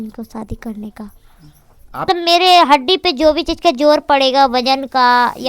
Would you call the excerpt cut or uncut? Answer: cut